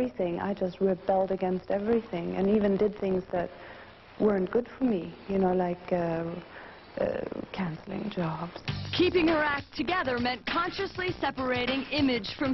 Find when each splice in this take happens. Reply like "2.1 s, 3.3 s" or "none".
4.3 s